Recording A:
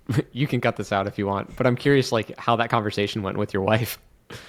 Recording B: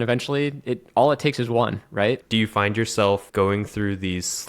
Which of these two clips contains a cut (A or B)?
B